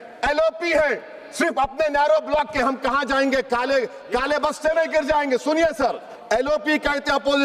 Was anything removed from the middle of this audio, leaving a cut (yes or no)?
yes